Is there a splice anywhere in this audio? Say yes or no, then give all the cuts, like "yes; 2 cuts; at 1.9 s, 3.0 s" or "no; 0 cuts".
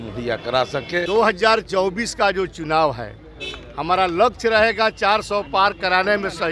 yes; 1 cut; at 1.1 s